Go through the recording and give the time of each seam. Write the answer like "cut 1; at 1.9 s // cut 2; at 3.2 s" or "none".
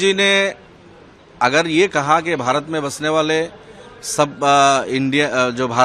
none